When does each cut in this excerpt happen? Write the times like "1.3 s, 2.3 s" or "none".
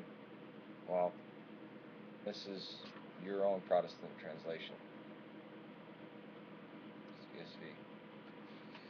none

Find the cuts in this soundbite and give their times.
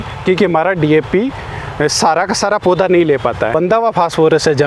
3.5 s

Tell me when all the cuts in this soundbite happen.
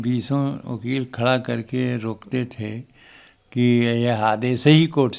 none

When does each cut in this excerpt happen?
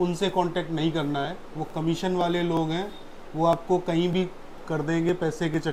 none

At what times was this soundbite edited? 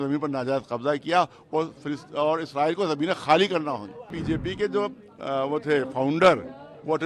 4.2 s

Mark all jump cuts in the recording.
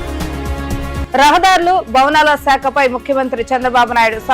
1.0 s

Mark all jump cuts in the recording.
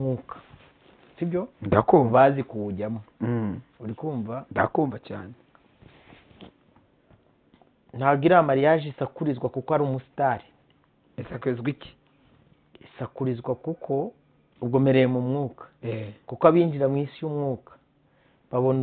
none

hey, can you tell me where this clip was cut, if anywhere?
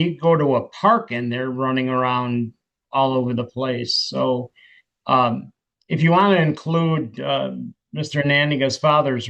none

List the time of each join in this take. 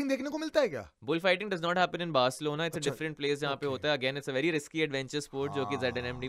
none

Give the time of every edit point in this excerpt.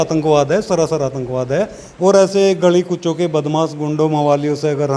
1.8 s

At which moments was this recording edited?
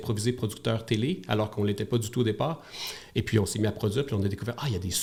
none

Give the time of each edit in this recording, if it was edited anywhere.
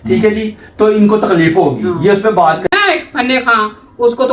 2.7 s

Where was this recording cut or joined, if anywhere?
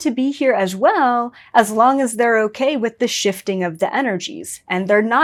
none

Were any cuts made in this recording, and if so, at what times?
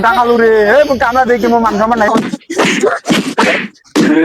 2.1 s

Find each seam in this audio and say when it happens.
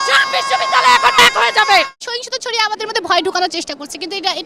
2.0 s

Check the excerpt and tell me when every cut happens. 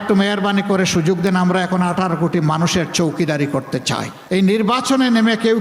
4.1 s

